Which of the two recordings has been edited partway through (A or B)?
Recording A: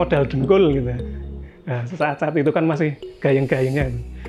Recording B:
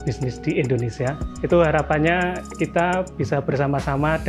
B